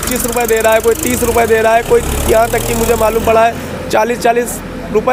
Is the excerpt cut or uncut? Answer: uncut